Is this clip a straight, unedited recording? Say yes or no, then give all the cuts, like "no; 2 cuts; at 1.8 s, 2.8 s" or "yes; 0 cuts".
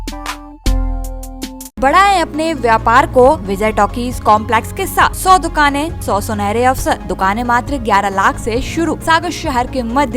no; 6 cuts; at 1.8 s, 3.5 s, 5.2 s, 6.0 s, 7.1 s, 9.0 s